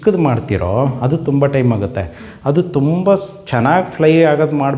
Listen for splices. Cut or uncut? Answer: uncut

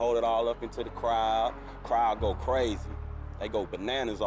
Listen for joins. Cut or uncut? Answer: cut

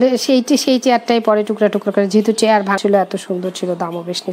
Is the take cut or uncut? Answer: cut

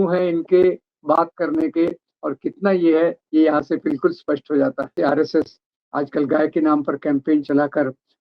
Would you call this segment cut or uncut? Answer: cut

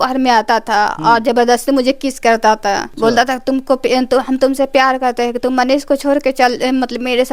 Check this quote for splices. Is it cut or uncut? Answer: cut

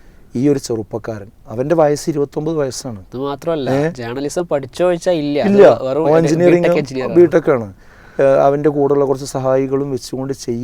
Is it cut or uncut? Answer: uncut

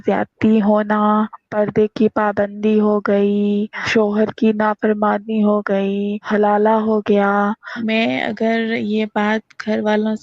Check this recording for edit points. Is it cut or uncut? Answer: cut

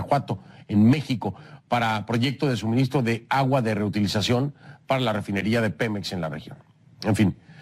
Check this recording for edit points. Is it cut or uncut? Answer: uncut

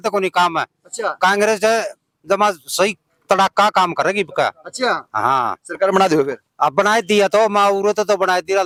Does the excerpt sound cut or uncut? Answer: uncut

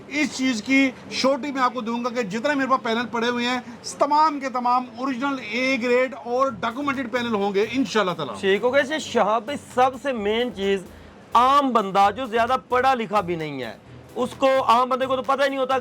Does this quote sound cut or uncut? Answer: uncut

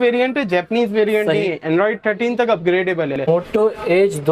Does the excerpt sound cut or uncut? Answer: cut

